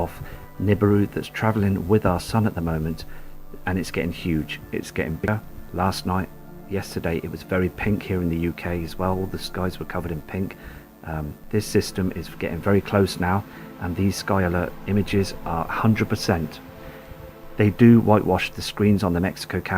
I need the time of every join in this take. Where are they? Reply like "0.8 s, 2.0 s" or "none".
15.0 s